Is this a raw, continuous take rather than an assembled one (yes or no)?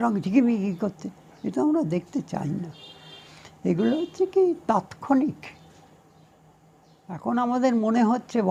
yes